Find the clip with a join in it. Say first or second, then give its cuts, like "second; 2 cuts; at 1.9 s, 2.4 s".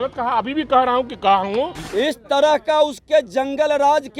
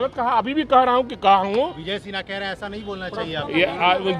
first; 1 cut; at 1.8 s